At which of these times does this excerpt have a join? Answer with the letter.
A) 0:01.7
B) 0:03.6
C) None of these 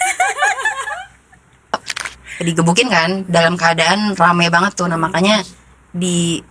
A